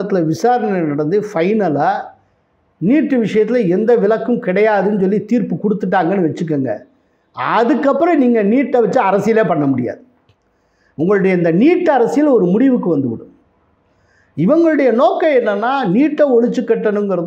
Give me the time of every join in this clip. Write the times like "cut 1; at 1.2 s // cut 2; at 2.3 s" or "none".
none